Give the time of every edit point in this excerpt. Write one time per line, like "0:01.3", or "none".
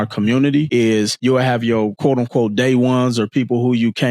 0:01.0
0:01.9